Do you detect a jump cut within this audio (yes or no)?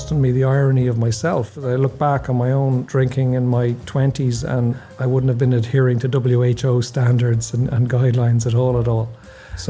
yes